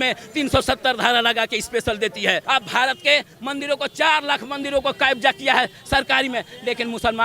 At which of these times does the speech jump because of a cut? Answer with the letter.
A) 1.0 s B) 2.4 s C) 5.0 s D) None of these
B